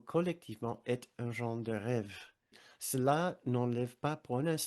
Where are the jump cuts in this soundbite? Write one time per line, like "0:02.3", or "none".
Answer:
0:02.6